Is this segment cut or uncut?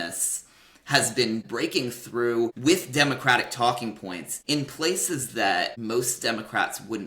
cut